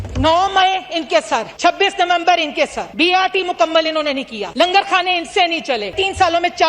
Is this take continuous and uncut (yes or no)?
no